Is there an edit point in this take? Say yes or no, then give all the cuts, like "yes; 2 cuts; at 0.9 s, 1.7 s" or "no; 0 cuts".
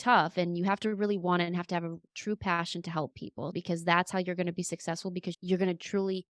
yes; 2 cuts; at 3.5 s, 5.3 s